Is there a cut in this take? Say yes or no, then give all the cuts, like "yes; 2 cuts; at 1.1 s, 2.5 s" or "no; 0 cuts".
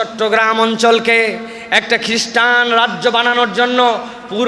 no; 0 cuts